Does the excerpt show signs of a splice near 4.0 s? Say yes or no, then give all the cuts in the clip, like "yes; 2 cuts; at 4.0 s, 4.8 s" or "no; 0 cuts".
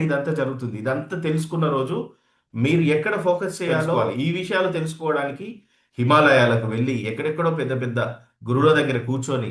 yes; 1 cut; at 4.0 s